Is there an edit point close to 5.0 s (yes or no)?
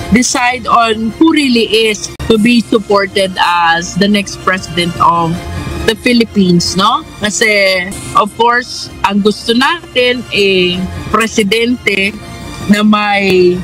no